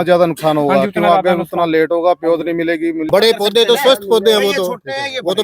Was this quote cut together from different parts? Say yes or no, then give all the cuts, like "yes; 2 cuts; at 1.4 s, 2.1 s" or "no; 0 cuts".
yes; 1 cut; at 3.0 s